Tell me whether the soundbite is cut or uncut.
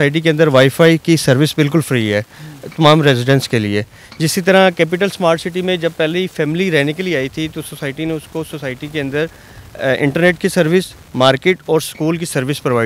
uncut